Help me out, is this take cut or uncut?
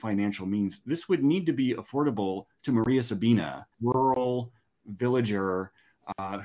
uncut